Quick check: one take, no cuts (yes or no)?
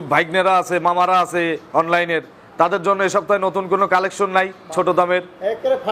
yes